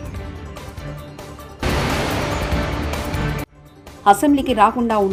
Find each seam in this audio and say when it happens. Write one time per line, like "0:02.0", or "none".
none